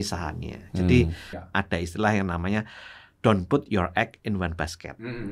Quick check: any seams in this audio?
yes; 1 cut; at 1.4 s

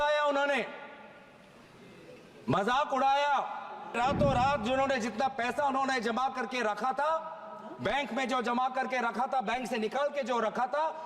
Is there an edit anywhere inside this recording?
yes; 1 cut; at 3.9 s

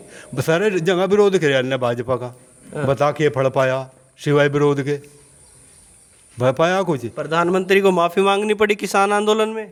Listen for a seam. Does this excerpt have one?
no; 0 cuts

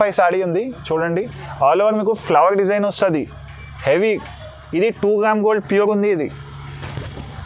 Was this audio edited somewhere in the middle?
no; 0 cuts

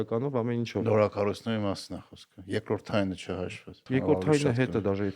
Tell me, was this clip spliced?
yes; 1 cut; at 3.8 s

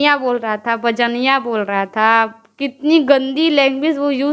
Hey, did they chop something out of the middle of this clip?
no; 0 cuts

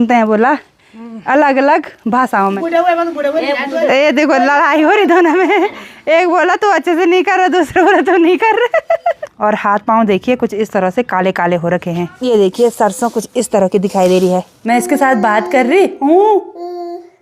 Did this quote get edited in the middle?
yes; 4 cuts; at 2.6 s, 9.3 s, 12.1 s, 14.5 s

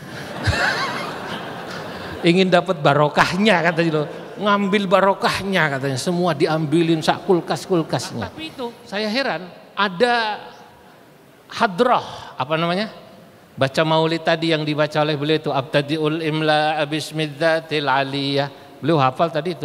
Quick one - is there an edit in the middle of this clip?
yes; 1 cut; at 8.4 s

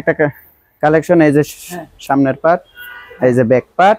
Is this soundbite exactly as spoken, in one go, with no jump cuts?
yes; 0 cuts

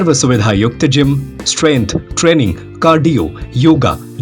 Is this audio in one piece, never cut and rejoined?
yes; 0 cuts

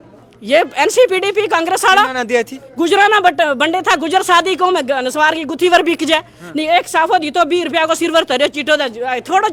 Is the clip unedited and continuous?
yes; 0 cuts

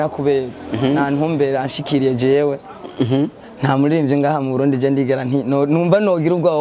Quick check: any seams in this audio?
yes; 1 cut; at 3.4 s

